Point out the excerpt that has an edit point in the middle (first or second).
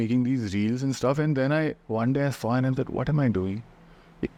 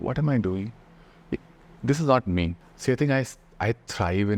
second